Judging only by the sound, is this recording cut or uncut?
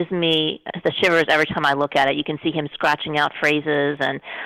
uncut